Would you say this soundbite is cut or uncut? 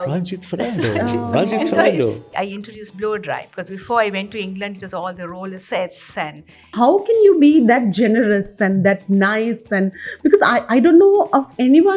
cut